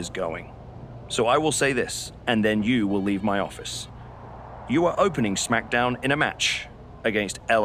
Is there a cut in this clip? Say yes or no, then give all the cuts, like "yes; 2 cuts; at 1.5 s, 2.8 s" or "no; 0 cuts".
no; 0 cuts